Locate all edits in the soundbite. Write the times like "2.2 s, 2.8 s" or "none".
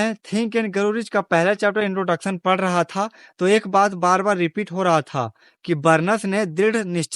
none